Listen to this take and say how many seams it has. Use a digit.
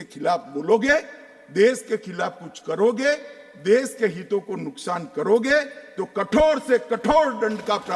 0